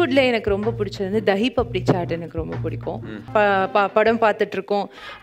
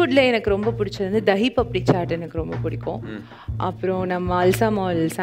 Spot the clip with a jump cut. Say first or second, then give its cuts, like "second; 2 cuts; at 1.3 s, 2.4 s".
first; 1 cut; at 3.2 s